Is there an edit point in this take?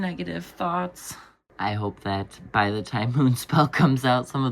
yes; 1 cut; at 1.4 s

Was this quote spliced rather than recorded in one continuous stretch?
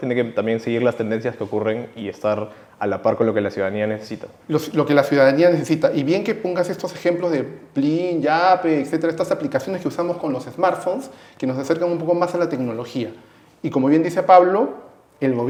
no; 0 cuts

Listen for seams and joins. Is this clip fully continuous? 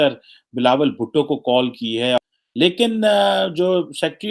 no; 1 cut; at 2.2 s

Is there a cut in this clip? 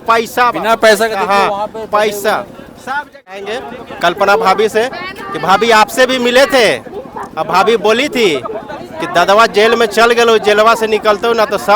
yes; 1 cut; at 3.6 s

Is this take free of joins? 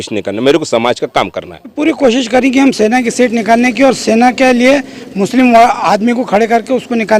no; 1 cut; at 1.8 s

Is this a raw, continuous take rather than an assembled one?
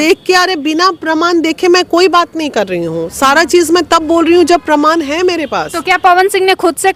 yes; 0 cuts

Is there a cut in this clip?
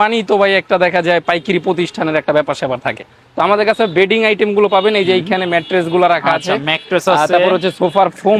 no; 0 cuts

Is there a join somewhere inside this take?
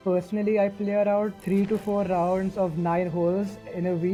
no; 0 cuts

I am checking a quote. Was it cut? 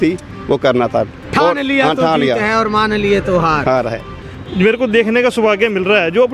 yes; 1 cut; at 4.2 s

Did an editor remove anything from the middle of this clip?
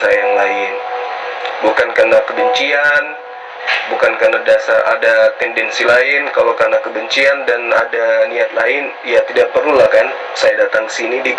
no; 0 cuts

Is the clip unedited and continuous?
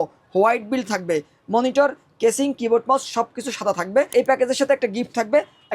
no; 1 cut; at 4.1 s

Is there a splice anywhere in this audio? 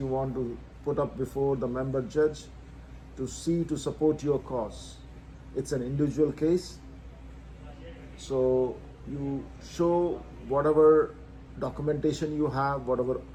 no; 0 cuts

